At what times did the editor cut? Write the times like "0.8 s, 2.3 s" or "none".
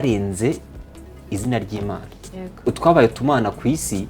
2.6 s